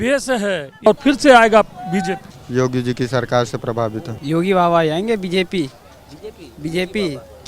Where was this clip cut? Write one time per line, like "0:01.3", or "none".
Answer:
0:00.9
0:02.3
0:04.1